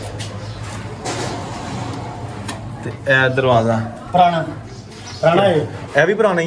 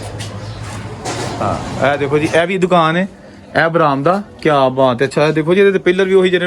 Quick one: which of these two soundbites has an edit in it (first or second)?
second